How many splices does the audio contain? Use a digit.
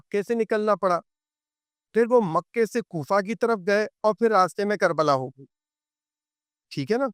0